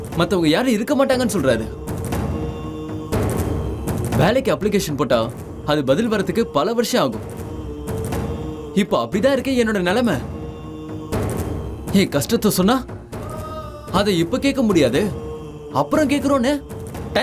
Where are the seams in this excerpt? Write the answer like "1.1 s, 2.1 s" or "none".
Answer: none